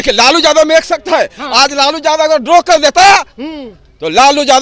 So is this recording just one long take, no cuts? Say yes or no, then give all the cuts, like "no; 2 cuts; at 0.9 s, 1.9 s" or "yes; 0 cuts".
yes; 0 cuts